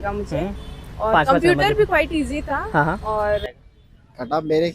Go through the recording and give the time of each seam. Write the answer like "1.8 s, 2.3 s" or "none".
3.4 s